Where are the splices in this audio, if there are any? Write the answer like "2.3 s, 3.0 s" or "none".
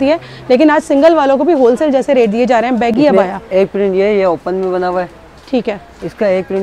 none

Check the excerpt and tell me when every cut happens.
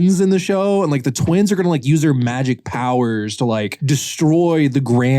3.8 s

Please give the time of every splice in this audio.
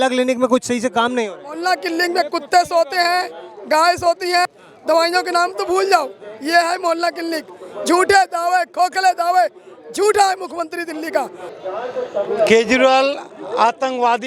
none

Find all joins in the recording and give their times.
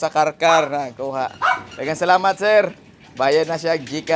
none

